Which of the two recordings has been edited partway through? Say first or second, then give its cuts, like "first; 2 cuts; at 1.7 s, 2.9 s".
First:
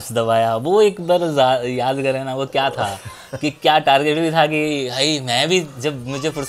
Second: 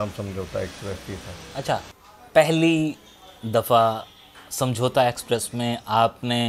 second; 1 cut; at 1.9 s